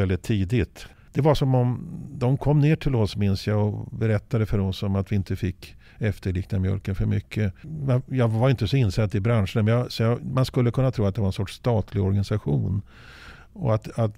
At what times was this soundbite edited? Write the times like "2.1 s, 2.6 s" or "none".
1.0 s

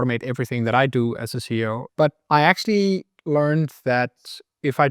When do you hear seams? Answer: 1.8 s

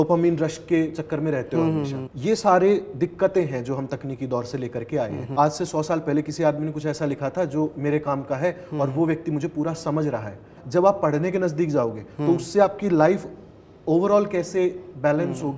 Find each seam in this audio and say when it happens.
2.1 s, 5.2 s, 10.5 s

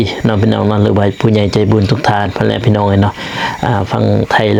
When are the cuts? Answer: none

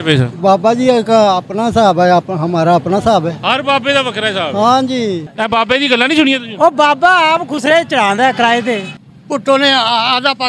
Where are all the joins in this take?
5.3 s, 8.9 s

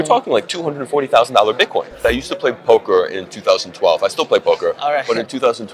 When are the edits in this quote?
2.0 s

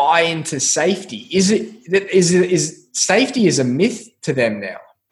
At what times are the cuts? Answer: none

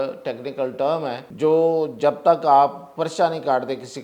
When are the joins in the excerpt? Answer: 1.2 s

